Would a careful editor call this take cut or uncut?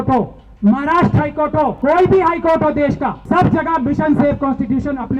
cut